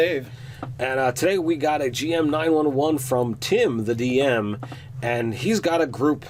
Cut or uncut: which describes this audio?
uncut